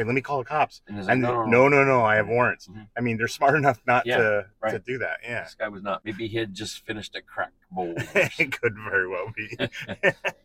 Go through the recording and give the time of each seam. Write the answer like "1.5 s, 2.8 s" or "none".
6.0 s